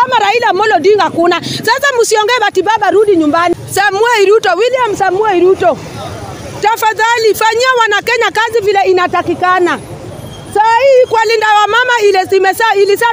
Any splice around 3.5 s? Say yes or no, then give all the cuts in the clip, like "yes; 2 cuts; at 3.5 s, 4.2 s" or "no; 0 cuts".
yes; 1 cut; at 3.5 s